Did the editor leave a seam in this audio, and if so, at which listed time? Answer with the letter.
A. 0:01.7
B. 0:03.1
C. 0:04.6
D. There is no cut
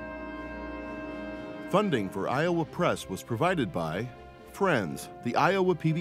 A